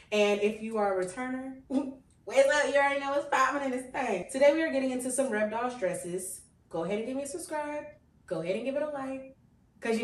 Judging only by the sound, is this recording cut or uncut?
uncut